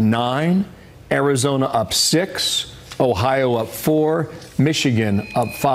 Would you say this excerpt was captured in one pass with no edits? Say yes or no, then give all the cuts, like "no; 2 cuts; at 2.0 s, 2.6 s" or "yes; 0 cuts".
yes; 0 cuts